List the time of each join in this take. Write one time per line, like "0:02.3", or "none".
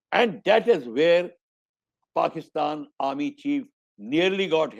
none